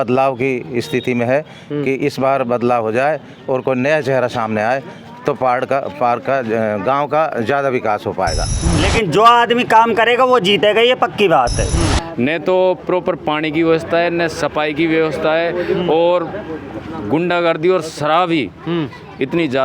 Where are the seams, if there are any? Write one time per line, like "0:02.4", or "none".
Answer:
0:08.5
0:11.7